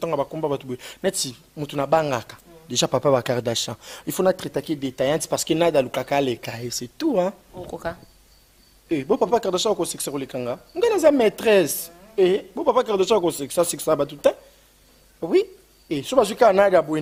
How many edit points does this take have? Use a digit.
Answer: 0